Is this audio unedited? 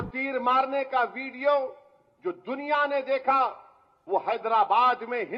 yes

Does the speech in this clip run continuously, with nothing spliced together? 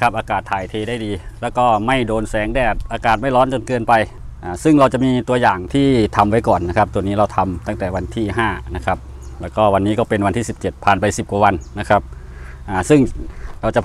yes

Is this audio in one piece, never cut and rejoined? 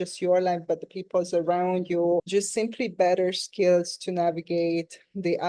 no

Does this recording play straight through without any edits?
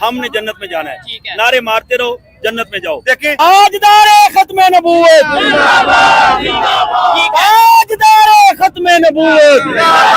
no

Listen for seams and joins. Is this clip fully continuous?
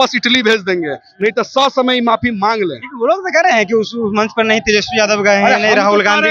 yes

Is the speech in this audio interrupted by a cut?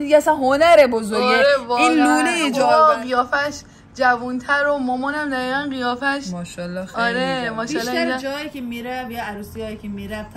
yes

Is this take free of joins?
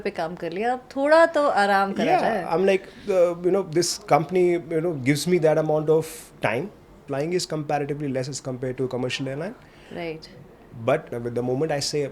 no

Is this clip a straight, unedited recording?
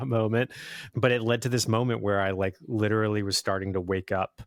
yes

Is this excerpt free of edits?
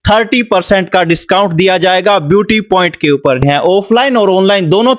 no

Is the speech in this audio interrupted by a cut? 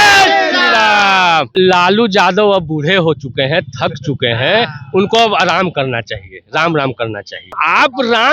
yes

